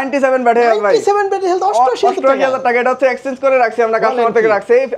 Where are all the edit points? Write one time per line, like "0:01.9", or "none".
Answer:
none